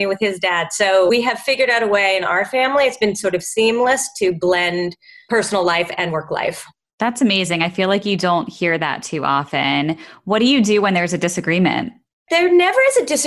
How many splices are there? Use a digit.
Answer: 0